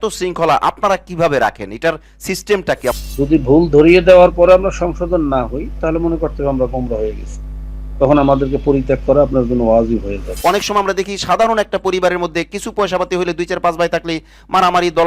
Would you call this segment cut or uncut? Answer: cut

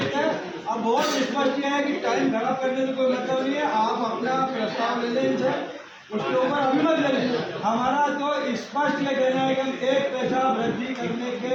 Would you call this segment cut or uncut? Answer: uncut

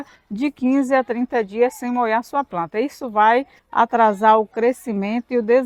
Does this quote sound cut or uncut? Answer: uncut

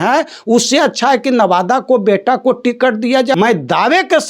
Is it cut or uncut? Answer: cut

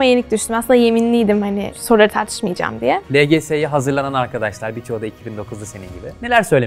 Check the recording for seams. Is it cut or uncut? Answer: cut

